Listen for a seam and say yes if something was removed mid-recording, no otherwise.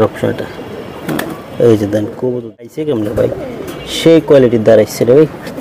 yes